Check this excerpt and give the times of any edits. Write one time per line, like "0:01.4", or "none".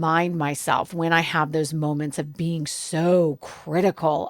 none